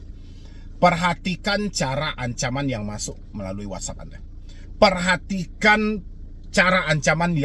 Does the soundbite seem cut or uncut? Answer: uncut